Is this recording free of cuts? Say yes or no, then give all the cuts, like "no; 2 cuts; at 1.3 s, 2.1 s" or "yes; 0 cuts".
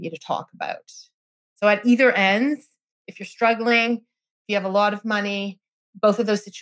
yes; 0 cuts